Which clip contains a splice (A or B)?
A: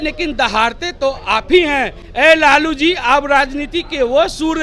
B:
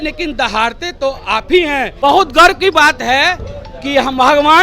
B